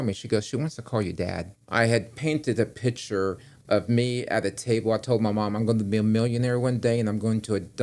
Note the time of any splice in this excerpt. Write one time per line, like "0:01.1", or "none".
0:01.5